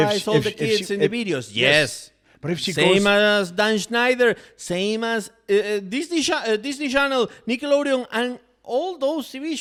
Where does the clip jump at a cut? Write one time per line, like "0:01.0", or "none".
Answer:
none